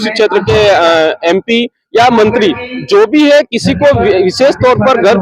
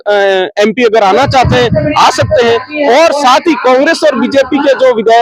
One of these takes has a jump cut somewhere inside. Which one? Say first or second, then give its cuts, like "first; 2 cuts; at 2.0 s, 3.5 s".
first; 1 cut; at 1.2 s